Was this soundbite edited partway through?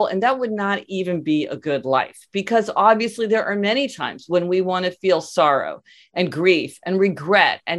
no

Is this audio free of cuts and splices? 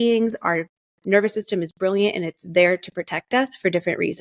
yes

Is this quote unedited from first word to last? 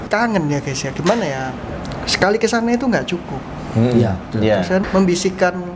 no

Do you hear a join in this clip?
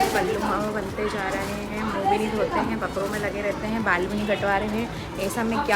no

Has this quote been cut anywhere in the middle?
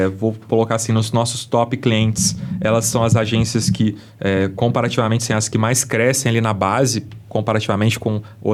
no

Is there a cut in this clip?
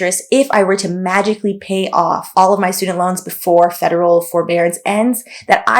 yes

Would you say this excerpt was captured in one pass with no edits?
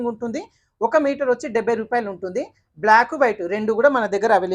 yes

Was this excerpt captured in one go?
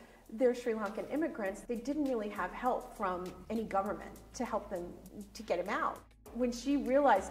no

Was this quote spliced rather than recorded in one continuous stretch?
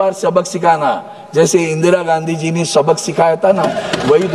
no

